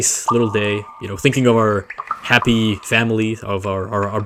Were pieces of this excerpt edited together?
no; 0 cuts

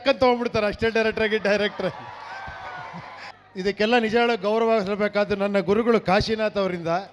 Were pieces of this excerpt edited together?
yes; 1 cut; at 3.3 s

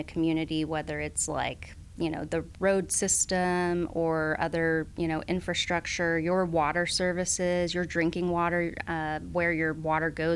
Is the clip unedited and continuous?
yes; 0 cuts

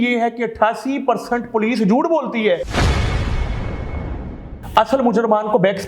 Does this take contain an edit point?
yes; 1 cut; at 4.5 s

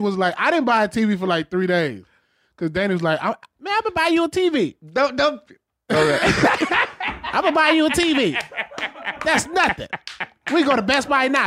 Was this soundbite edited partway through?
no; 0 cuts

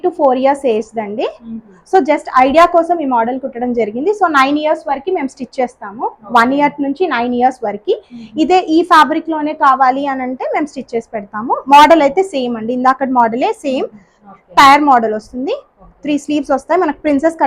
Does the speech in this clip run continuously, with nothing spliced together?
yes; 0 cuts

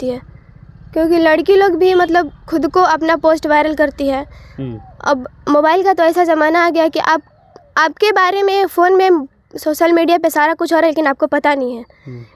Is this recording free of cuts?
yes; 0 cuts

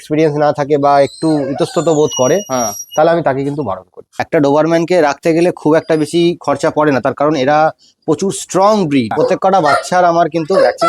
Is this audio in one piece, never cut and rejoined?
no; 2 cuts; at 4.2 s, 9.1 s

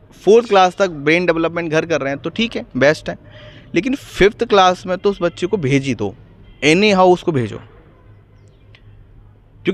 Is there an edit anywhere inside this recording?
no; 0 cuts

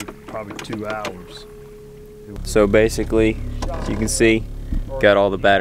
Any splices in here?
yes; 1 cut; at 2.4 s

